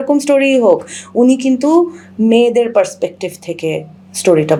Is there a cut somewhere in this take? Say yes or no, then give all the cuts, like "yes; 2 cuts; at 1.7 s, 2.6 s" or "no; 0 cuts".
no; 0 cuts